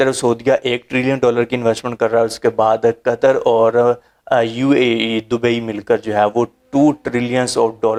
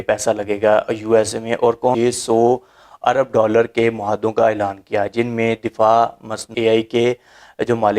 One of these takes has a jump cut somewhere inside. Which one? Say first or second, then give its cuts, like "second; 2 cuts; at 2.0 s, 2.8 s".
second; 2 cuts; at 1.9 s, 6.5 s